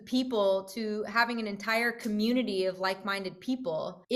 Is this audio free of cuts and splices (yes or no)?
yes